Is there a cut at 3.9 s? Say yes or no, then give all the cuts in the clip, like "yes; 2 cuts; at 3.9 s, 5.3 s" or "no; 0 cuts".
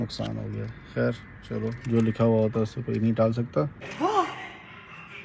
yes; 1 cut; at 3.9 s